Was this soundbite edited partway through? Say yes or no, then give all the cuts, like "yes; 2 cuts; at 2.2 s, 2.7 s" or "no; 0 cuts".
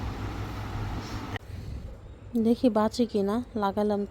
yes; 1 cut; at 1.4 s